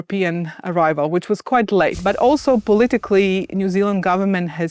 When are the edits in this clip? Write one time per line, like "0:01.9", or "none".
0:02.0